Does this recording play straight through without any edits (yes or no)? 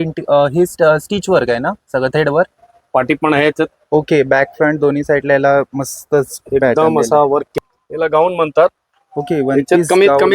no